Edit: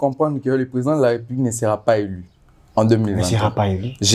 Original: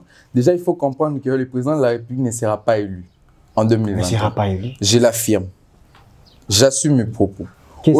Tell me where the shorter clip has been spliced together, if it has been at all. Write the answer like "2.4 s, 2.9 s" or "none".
none